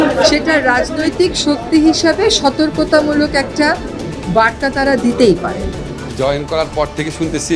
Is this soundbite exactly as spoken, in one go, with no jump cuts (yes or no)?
no